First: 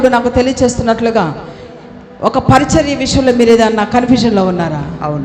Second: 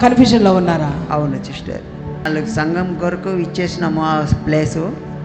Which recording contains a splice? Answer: second; 1 cut; at 2.2 s

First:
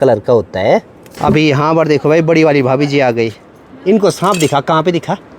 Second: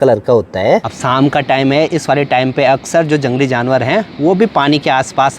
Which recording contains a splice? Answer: second; 1 cut; at 0.9 s

